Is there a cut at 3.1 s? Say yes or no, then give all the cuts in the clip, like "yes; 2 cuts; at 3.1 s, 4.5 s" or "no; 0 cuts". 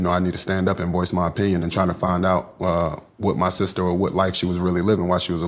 no; 0 cuts